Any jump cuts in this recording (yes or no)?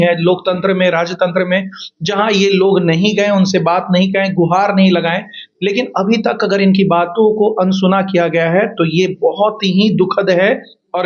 no